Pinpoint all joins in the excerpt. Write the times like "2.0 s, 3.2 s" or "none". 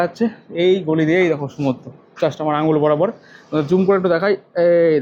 none